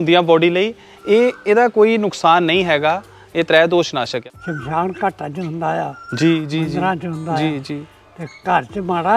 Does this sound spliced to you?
yes; 1 cut; at 4.2 s

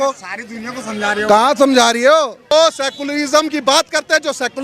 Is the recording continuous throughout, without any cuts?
no; 1 cut; at 2.4 s

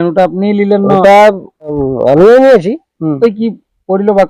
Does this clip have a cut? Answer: yes; 2 cuts; at 1.7 s, 3.2 s

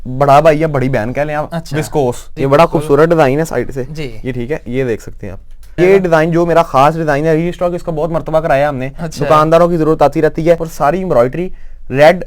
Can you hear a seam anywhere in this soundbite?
yes; 3 cuts; at 2.3 s, 5.7 s, 10.7 s

